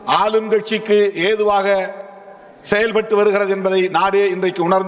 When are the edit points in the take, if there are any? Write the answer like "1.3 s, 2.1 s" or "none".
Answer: none